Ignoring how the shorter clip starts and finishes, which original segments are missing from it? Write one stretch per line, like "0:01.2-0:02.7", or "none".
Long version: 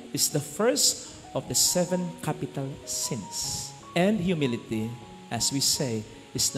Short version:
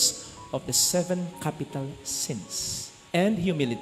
none